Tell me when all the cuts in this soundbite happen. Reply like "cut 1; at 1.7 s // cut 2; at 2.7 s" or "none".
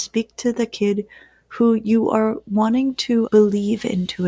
cut 1; at 3.3 s